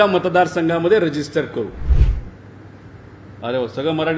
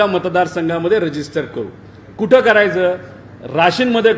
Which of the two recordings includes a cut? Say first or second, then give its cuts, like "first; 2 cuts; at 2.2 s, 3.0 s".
first; 1 cut; at 2.0 s